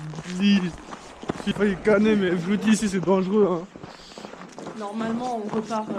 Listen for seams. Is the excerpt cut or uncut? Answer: uncut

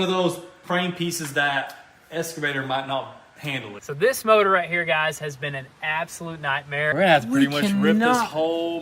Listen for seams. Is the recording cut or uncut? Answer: cut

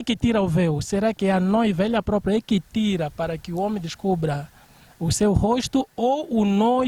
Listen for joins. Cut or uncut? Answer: uncut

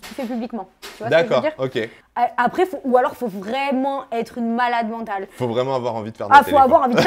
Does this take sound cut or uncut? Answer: cut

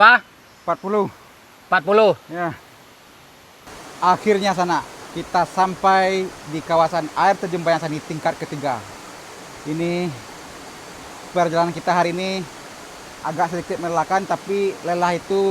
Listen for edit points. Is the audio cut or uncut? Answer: cut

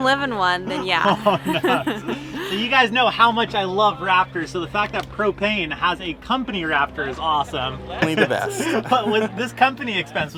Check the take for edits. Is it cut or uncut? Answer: uncut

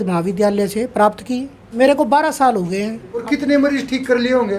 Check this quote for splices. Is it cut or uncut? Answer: cut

